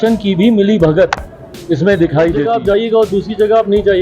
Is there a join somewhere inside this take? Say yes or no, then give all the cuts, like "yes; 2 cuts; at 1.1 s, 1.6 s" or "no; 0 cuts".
yes; 1 cut; at 2.5 s